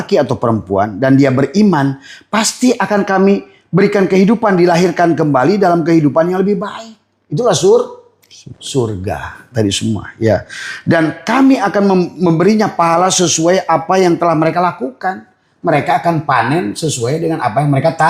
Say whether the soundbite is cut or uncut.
uncut